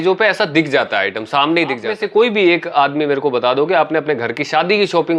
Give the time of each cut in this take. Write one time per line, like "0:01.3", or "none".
0:02.0